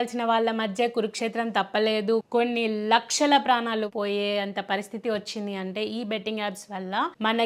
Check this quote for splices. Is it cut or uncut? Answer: uncut